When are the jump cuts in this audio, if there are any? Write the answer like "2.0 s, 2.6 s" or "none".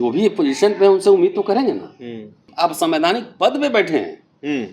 2.4 s